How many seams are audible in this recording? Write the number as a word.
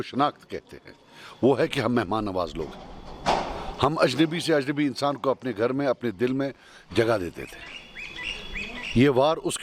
zero